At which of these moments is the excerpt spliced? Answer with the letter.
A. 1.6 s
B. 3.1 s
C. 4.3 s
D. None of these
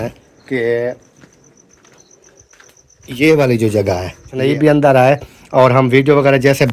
C